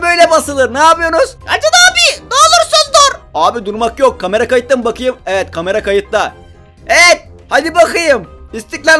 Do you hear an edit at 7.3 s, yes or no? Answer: no